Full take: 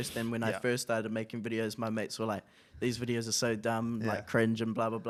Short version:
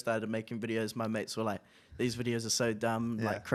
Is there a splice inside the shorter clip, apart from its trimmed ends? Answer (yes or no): no